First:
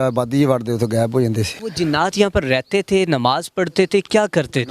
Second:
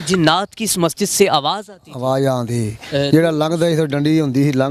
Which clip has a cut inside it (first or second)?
first